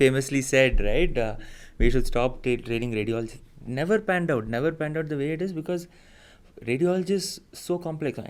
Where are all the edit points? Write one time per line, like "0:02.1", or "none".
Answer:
none